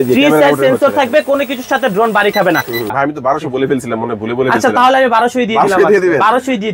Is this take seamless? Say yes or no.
no